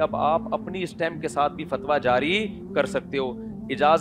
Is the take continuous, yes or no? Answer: yes